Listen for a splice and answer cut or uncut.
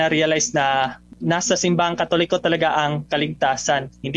cut